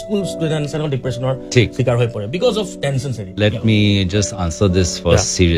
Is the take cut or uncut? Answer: cut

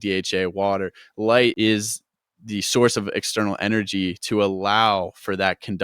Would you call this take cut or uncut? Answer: cut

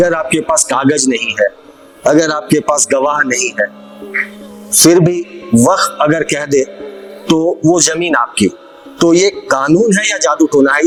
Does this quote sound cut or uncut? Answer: uncut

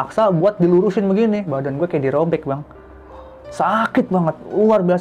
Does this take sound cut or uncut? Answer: cut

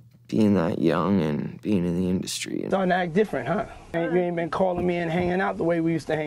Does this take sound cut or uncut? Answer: cut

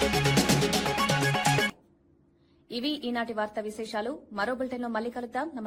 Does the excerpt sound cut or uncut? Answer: uncut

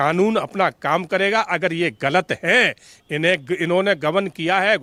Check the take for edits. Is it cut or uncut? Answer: uncut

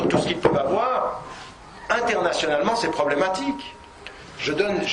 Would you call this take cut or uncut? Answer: uncut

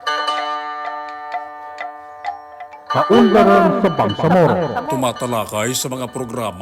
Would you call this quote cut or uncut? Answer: cut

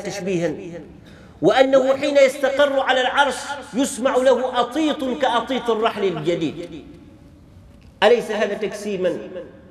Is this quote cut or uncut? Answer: uncut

